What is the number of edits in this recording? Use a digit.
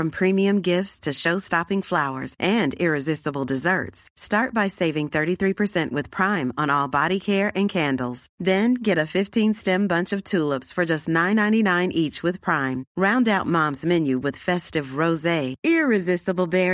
0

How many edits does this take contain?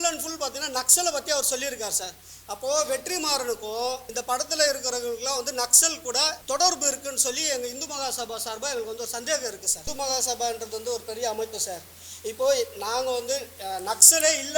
3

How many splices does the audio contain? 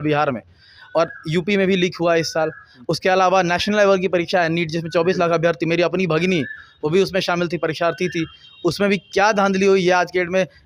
0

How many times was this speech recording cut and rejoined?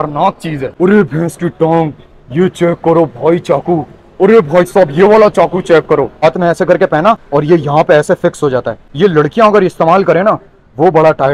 1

